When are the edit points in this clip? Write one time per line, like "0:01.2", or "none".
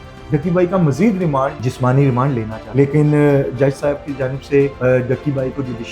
0:01.6
0:02.6
0:04.7